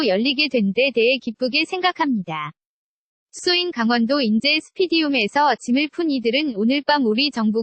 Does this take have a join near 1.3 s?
no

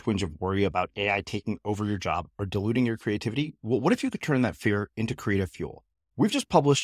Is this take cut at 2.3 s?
no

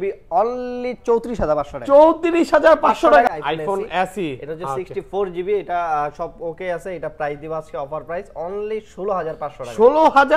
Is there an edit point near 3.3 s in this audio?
yes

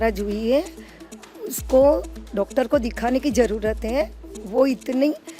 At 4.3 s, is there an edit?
no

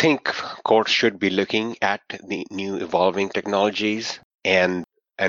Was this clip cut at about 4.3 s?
no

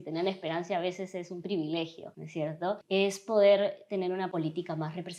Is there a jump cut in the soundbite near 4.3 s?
yes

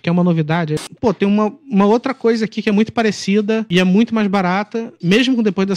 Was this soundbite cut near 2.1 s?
no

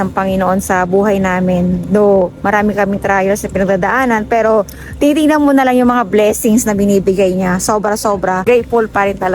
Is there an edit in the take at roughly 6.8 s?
no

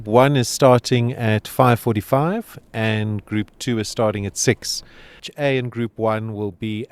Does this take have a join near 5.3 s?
yes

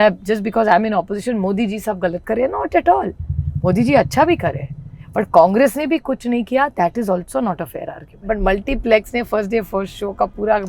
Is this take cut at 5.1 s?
no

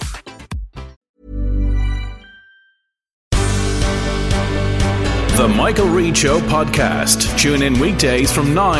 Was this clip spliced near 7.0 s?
no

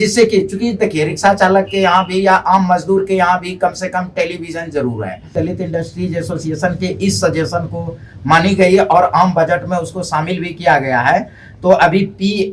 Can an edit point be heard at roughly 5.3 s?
yes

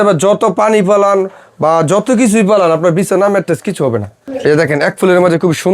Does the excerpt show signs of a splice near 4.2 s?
yes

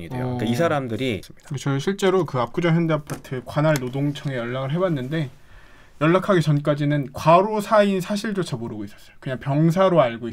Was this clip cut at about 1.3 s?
yes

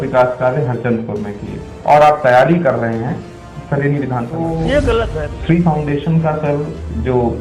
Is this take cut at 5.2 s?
yes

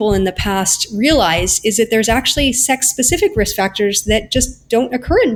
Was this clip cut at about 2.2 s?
no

